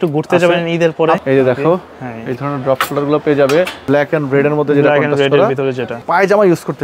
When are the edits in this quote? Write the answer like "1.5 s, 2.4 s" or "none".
1.2 s, 3.8 s, 5.9 s